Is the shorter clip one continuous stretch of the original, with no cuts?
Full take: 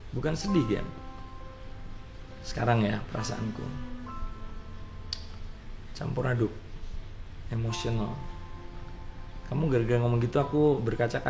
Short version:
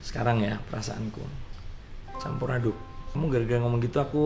no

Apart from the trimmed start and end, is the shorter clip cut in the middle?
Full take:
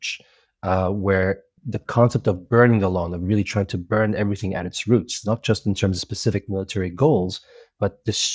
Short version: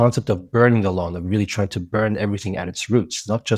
no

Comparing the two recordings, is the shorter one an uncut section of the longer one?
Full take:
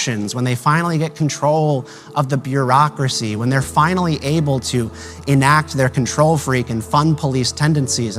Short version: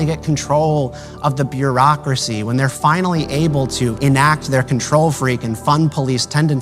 no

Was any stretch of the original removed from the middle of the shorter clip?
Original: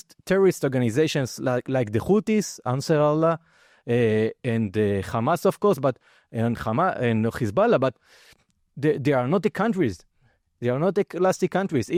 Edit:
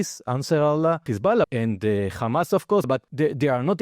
yes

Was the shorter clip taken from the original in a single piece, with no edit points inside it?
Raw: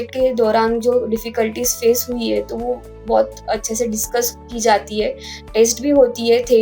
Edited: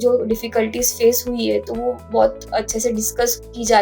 no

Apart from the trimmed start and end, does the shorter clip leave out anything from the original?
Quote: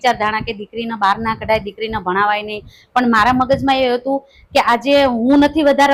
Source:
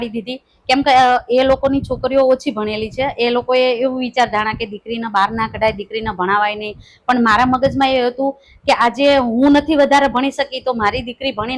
no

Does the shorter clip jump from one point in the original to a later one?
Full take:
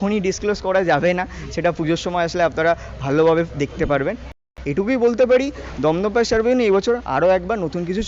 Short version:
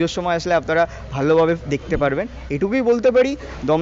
yes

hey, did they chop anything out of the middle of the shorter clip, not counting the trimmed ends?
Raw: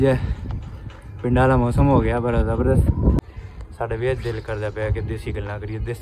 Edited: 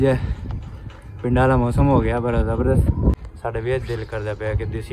yes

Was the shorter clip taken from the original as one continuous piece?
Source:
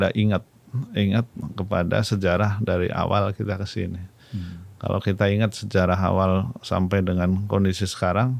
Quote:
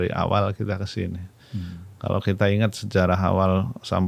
yes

